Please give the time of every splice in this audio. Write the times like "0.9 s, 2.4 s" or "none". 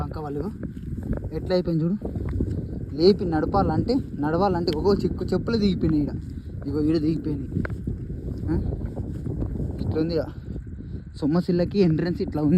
none

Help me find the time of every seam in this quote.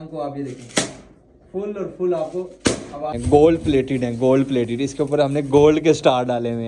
3.1 s

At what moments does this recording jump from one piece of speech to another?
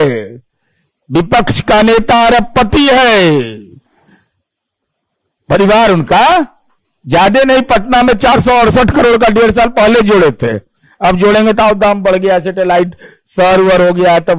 none

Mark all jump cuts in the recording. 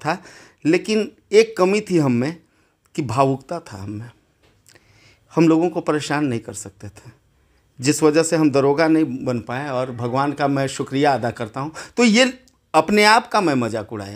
none

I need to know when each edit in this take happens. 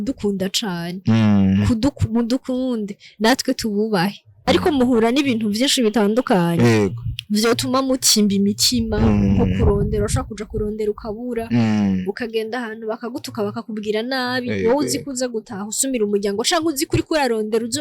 4.5 s

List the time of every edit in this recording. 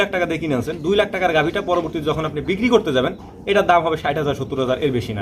none

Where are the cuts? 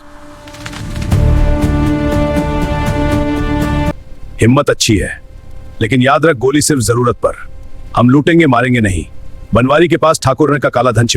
3.9 s

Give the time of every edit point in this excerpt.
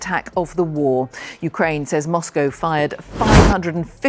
none

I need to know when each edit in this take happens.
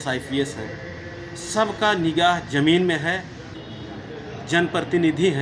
3.4 s

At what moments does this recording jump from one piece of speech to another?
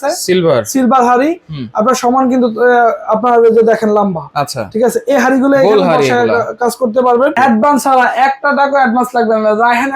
7.3 s

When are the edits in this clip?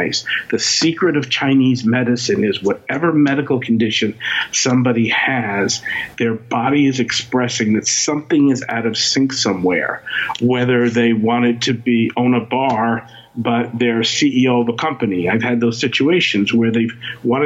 none

